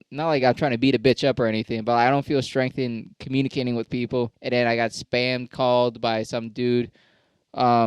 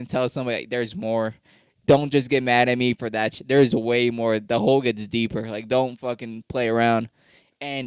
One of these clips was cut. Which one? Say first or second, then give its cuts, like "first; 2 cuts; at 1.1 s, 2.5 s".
first; 1 cut; at 4.4 s